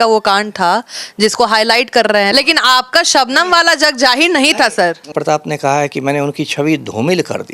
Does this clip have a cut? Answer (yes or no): yes